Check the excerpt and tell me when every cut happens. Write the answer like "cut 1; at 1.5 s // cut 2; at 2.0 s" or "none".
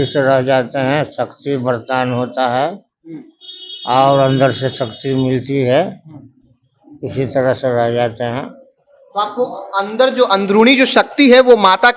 none